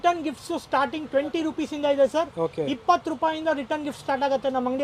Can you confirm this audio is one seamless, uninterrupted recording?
yes; 0 cuts

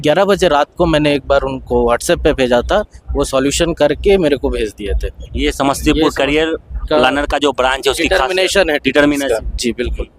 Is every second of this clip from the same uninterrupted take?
yes; 0 cuts

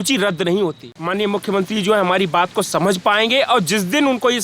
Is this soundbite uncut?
no; 1 cut; at 0.9 s

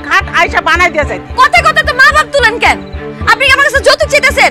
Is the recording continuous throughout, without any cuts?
yes; 0 cuts

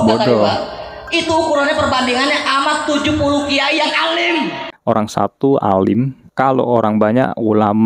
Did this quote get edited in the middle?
yes; 1 cut; at 4.6 s

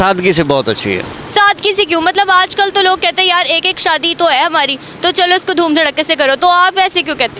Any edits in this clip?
no; 0 cuts

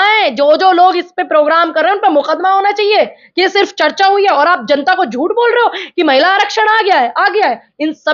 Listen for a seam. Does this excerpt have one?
no; 0 cuts

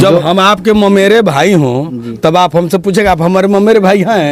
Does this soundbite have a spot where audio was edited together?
no; 0 cuts

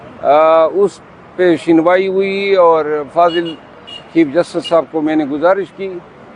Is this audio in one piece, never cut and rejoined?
yes; 0 cuts

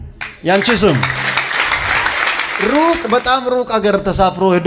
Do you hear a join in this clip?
yes; 1 cut; at 2.5 s

